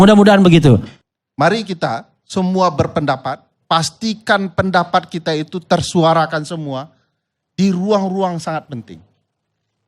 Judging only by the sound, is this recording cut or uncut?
cut